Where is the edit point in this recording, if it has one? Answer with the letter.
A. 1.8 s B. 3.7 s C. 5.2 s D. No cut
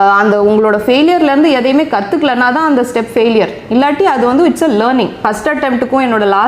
C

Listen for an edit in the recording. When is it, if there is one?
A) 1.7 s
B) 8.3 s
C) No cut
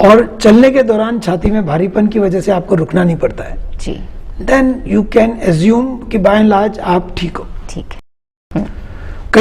B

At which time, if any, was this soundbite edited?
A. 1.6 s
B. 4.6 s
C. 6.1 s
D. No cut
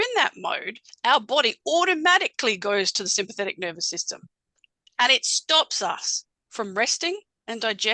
D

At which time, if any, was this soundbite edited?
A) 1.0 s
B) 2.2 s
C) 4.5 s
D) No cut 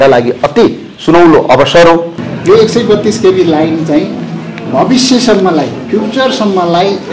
B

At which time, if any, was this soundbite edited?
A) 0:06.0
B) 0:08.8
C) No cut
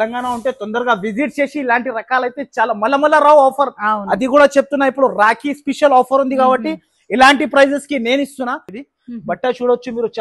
B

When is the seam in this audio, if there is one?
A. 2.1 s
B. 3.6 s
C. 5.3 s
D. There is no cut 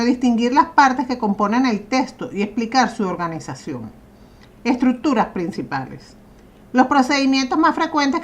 B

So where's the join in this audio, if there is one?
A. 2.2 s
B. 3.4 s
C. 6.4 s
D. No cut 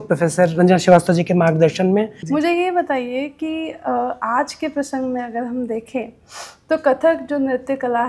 A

